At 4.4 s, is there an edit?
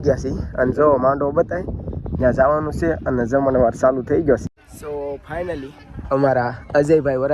yes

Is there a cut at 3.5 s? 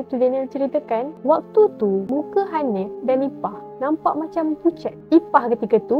no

